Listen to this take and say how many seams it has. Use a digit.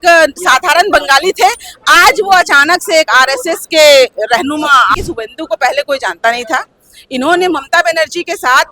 1